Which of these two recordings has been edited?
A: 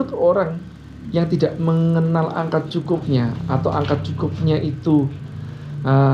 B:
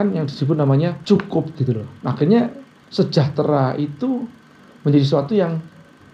B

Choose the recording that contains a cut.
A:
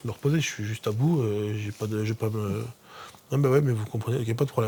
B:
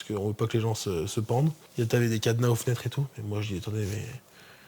B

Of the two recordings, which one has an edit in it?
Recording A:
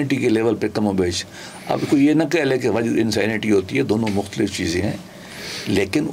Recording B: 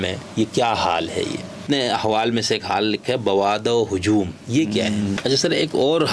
B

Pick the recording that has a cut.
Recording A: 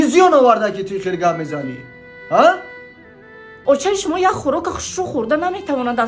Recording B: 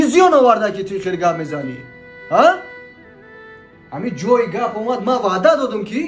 A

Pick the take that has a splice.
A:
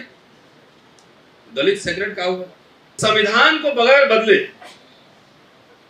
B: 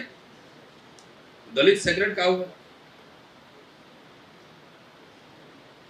A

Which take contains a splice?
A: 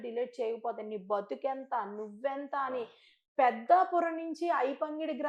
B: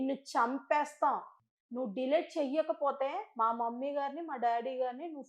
B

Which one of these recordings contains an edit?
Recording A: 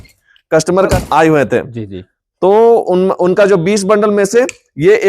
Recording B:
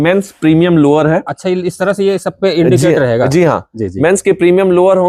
A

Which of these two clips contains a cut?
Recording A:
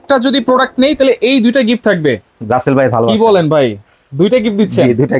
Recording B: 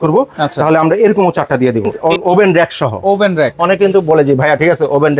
B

